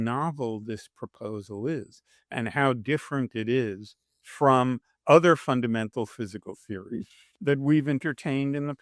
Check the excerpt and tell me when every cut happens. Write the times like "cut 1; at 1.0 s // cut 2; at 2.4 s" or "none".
none